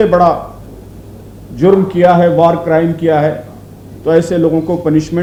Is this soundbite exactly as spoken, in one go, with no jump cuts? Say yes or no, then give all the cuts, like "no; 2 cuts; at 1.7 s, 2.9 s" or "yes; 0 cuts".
yes; 0 cuts